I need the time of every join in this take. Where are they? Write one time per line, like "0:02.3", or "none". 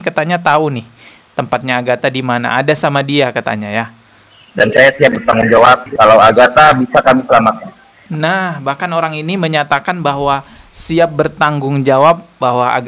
none